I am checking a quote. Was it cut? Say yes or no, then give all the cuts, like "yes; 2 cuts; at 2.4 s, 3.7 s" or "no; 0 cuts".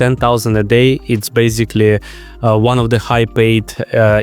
no; 0 cuts